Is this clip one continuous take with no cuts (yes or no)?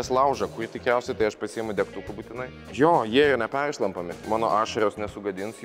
no